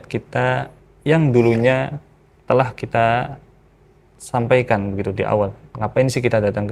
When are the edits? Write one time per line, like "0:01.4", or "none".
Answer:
none